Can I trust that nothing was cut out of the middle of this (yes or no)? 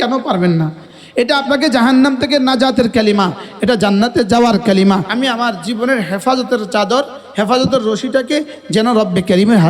no